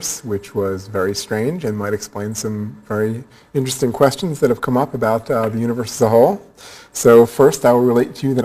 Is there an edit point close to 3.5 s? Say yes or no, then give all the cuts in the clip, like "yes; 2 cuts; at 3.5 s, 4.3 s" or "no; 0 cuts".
yes; 1 cut; at 3.5 s